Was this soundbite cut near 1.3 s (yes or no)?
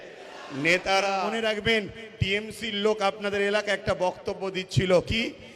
yes